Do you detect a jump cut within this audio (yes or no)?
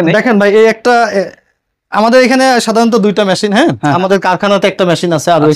no